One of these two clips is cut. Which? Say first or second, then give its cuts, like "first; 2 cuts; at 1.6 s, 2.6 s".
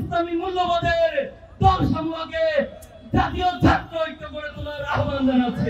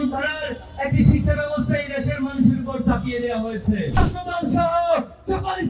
second; 1 cut; at 4.0 s